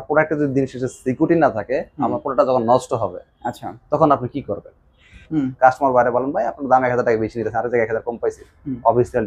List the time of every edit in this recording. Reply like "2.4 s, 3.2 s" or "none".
5.1 s